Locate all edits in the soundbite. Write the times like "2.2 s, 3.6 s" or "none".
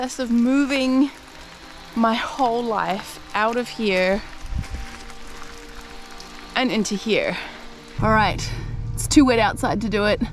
8.0 s